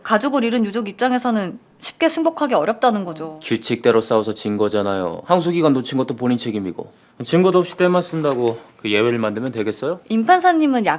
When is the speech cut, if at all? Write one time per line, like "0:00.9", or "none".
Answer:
none